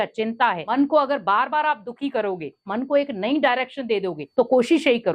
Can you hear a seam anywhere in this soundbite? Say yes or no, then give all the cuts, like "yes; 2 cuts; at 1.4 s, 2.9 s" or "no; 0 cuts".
yes; 3 cuts; at 0.7 s, 2.7 s, 4.2 s